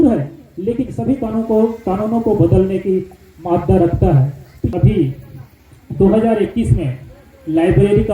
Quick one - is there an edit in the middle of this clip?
yes; 1 cut; at 4.7 s

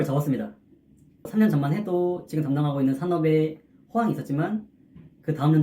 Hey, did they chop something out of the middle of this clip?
yes; 1 cut; at 1.2 s

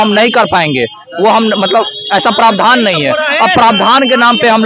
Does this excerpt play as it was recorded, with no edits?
yes; 0 cuts

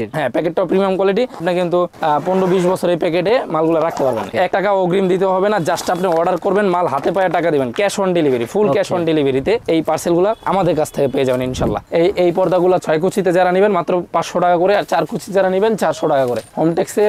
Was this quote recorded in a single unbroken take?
no; 2 cuts; at 4.3 s, 11.8 s

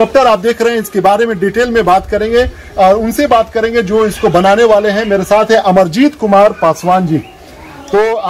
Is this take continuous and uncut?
yes; 0 cuts

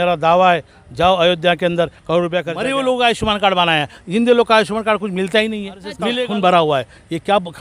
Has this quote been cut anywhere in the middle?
yes; 2 cuts; at 2.6 s, 6.0 s

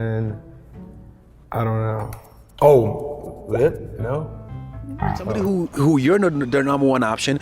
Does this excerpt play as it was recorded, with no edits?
yes; 0 cuts

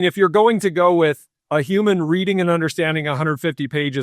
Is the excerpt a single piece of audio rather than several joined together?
no; 1 cut; at 1.3 s

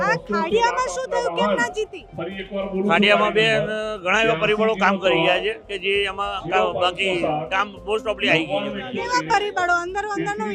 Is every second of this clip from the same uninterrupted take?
yes; 0 cuts

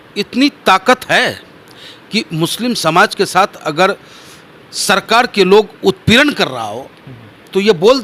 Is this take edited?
no; 0 cuts

